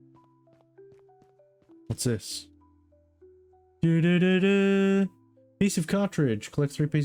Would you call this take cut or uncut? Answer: uncut